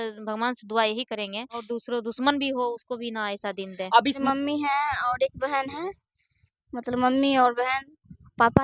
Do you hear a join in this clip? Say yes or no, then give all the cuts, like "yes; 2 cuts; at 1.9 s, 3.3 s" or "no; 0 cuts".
yes; 2 cuts; at 1.7 s, 4.2 s